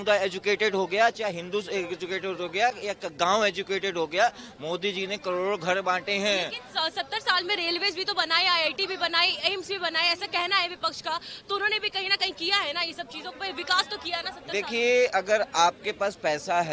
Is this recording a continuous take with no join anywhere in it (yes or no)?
yes